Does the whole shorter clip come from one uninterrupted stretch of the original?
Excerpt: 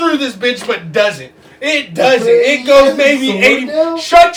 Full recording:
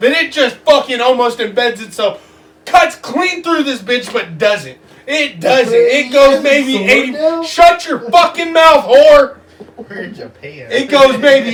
yes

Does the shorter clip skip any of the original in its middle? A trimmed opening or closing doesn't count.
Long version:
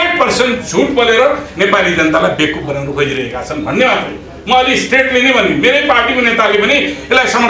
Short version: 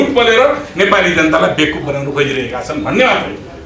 no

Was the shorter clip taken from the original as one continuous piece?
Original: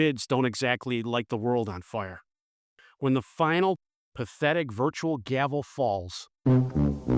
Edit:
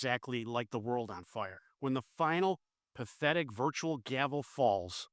no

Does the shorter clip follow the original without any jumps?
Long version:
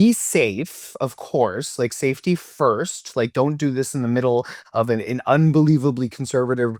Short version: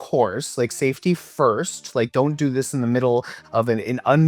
yes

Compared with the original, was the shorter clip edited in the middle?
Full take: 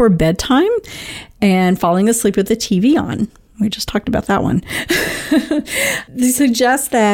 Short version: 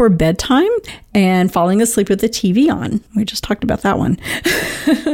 yes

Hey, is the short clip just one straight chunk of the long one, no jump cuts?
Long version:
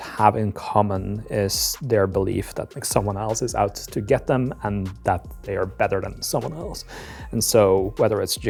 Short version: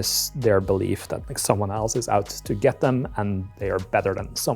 no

